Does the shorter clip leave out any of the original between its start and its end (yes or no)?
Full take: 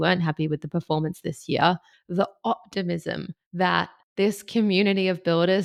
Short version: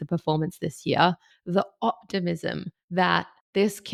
no